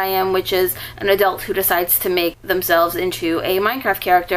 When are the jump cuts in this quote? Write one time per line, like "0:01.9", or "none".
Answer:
0:02.4